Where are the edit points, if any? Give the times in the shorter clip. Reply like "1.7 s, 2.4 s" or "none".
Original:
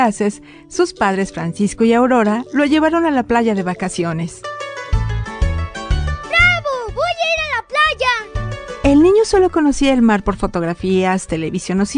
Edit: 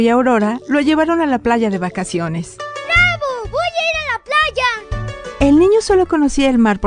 2.8 s